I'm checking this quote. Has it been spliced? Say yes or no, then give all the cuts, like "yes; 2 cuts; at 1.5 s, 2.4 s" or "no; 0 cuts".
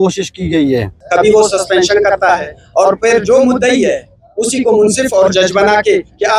yes; 1 cut; at 0.9 s